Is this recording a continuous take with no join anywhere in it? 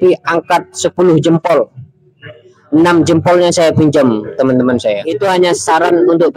no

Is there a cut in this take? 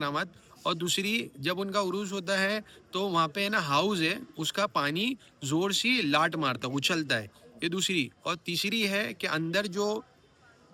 no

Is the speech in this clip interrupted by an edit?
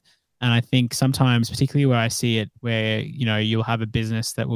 no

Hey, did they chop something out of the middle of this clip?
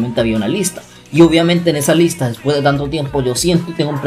no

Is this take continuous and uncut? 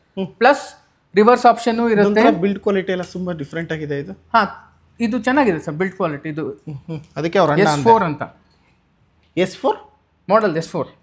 yes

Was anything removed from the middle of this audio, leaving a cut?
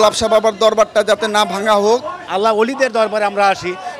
yes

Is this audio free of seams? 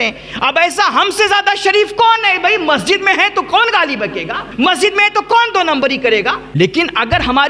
no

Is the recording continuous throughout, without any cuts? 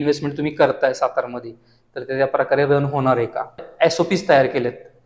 no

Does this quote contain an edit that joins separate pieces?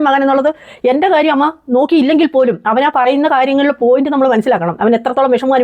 no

